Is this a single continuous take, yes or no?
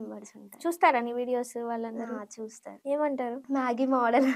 no